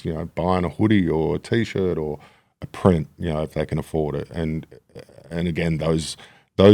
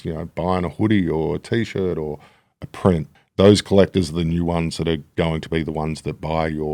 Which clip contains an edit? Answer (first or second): second